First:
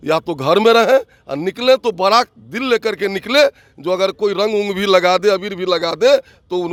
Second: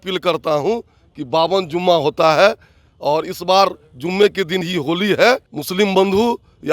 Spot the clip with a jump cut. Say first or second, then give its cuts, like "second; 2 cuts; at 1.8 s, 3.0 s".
second; 1 cut; at 5.6 s